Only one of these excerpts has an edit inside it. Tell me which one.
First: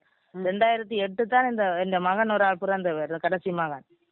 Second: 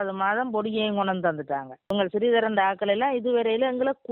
second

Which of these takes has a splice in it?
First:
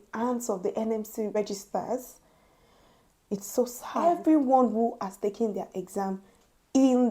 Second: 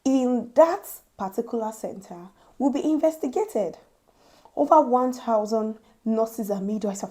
first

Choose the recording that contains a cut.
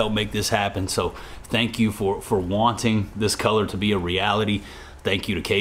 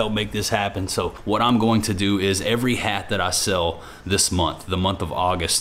second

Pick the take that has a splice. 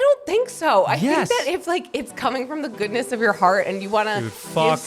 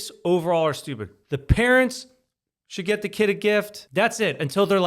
second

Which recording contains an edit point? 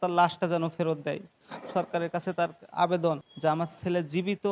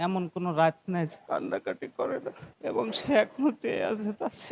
first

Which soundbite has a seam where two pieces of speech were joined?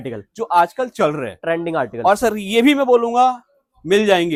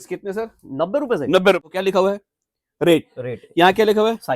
second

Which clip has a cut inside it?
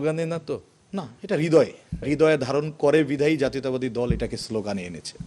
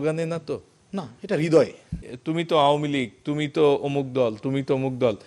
second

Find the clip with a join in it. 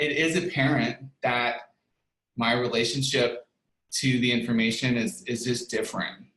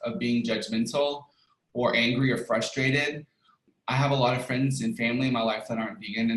second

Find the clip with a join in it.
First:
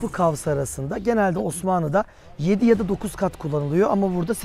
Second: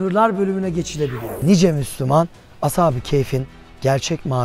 second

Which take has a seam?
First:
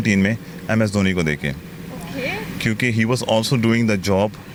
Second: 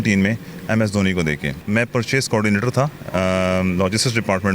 second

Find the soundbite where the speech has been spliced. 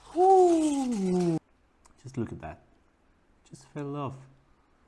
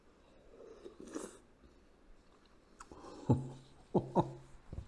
first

